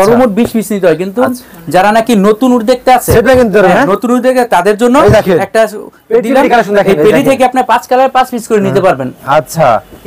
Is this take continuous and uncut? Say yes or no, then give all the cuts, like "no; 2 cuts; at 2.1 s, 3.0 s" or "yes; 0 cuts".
yes; 0 cuts